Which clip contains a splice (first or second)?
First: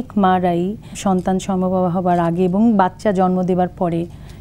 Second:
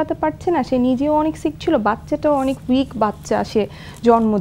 first